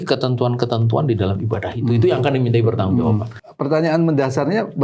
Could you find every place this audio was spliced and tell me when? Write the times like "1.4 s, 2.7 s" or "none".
3.4 s